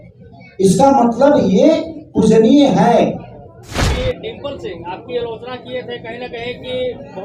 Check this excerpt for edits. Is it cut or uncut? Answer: cut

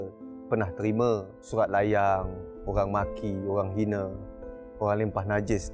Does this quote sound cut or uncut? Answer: cut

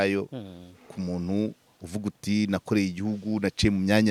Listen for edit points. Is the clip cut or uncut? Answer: uncut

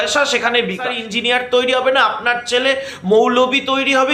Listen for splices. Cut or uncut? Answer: cut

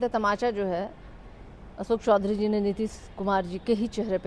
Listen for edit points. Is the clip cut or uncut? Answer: uncut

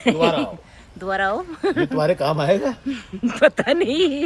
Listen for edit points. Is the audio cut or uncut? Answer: uncut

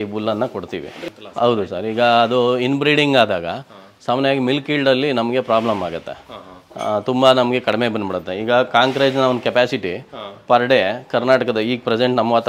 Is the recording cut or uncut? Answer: uncut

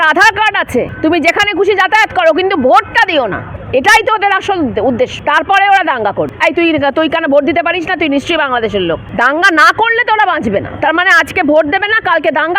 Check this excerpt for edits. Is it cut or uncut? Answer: cut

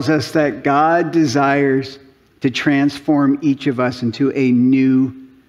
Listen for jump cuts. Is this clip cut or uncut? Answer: uncut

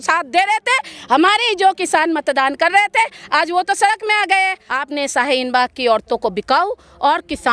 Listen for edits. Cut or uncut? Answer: cut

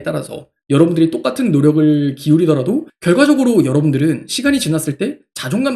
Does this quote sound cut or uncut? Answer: cut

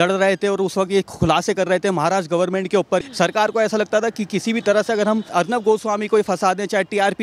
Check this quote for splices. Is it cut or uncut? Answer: cut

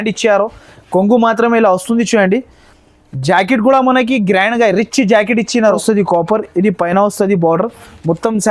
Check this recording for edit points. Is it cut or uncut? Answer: cut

